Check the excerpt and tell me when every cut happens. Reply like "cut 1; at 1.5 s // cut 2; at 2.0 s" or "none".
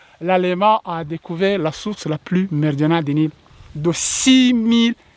cut 1; at 3.4 s